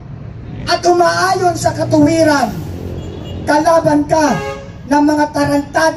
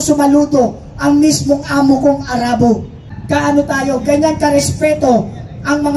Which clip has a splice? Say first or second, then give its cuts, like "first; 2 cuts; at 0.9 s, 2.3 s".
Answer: second; 1 cut; at 3.1 s